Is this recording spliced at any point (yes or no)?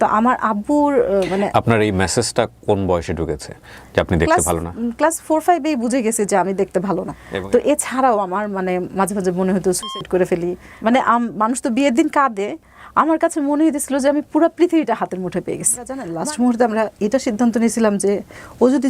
yes